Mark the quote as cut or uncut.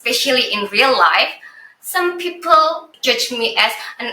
cut